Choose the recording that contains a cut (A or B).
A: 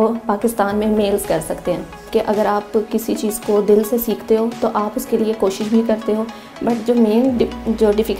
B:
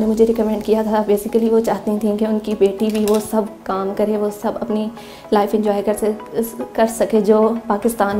A